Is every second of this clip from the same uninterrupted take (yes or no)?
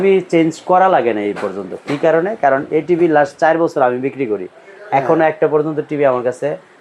yes